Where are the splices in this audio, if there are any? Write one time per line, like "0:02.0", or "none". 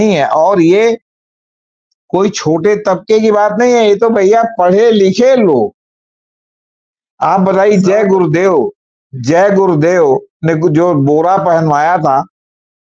none